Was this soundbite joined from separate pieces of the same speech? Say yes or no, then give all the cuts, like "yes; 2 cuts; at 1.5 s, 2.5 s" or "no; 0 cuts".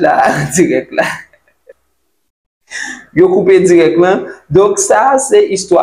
yes; 1 cut; at 1.7 s